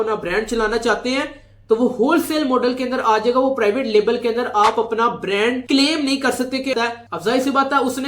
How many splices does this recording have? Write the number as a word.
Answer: one